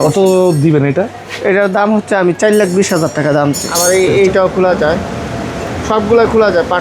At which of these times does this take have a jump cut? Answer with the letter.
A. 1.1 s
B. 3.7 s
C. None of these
B